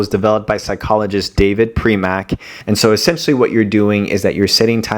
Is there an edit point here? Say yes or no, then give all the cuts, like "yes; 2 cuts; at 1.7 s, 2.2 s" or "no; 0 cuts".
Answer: yes; 1 cut; at 2.6 s